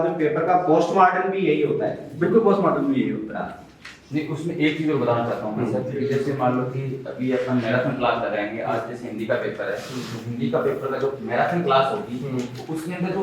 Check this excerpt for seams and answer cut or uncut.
uncut